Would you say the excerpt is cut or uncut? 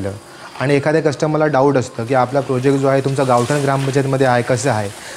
uncut